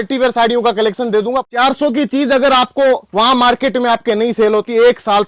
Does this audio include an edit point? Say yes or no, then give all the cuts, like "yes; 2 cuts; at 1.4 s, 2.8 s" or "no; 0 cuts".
yes; 1 cut; at 1.4 s